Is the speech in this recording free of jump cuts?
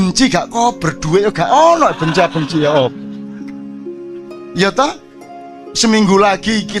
no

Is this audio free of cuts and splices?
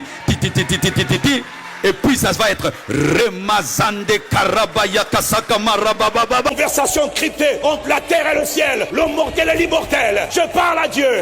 no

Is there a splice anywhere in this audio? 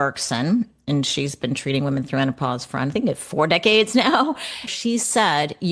yes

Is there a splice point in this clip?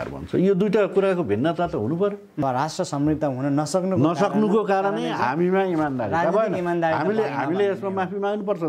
yes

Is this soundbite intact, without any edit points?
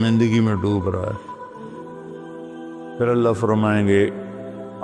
no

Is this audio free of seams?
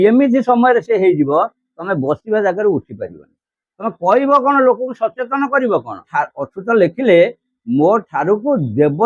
no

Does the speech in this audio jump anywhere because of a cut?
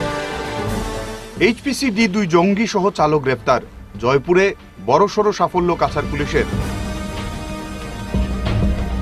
no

